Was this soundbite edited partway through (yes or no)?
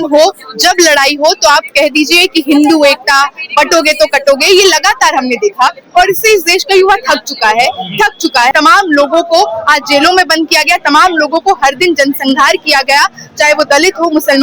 yes